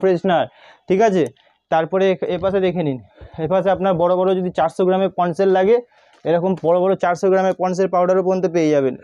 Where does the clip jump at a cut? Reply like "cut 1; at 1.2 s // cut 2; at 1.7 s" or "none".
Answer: none